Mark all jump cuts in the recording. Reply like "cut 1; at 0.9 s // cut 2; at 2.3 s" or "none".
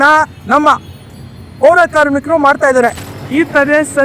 cut 1; at 3.1 s